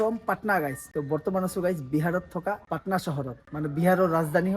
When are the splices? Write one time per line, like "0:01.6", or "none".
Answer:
0:02.6